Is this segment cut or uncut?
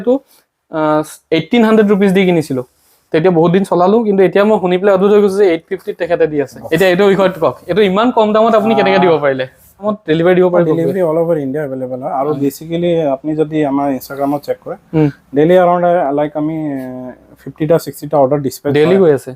cut